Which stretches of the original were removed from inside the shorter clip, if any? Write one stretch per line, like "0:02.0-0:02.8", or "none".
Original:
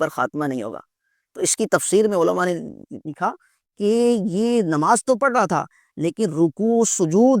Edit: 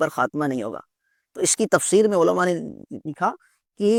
none